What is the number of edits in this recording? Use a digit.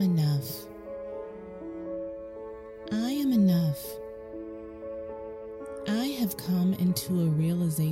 2